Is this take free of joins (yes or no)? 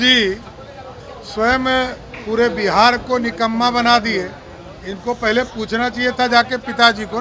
yes